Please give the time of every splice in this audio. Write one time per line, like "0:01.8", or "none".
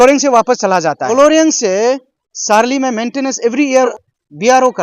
0:01.0
0:03.9